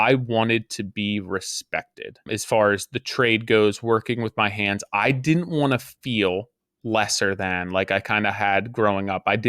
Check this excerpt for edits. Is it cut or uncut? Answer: cut